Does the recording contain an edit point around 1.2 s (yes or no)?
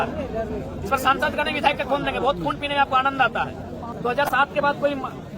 no